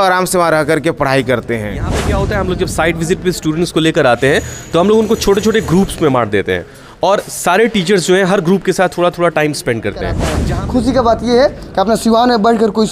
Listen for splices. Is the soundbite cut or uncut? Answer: cut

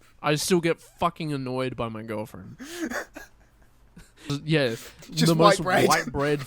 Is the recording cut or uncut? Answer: cut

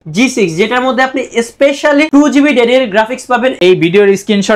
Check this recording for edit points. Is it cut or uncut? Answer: cut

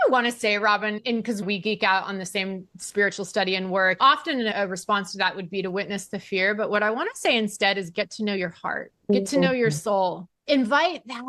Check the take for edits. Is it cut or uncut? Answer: uncut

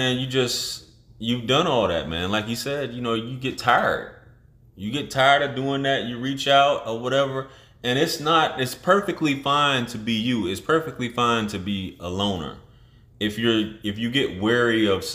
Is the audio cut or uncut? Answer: uncut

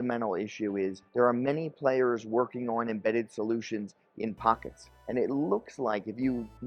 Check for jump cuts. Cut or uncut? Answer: cut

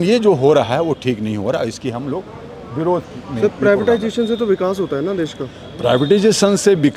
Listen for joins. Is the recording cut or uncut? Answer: uncut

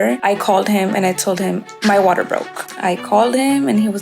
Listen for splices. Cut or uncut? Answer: cut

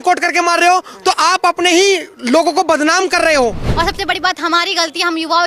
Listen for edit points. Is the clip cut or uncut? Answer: cut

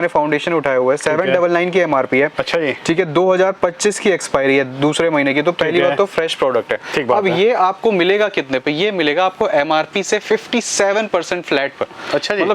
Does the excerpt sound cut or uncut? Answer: uncut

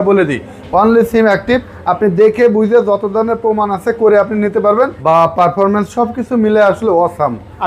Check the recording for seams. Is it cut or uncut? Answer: cut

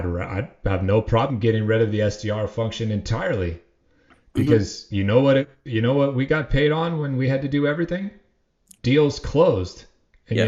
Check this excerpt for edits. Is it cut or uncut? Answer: uncut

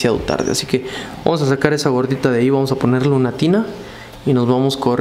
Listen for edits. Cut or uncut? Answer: uncut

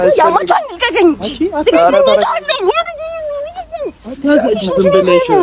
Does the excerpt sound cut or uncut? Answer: uncut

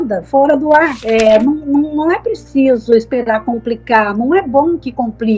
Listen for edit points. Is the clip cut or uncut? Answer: cut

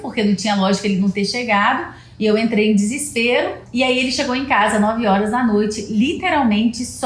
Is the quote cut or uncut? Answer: cut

